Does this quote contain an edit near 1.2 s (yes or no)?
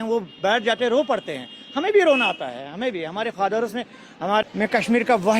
no